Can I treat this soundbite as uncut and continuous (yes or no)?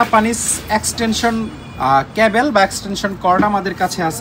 yes